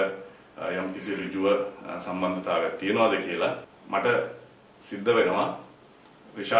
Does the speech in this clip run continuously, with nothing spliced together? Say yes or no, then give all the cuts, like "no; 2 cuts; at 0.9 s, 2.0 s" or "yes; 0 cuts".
no; 1 cut; at 3.6 s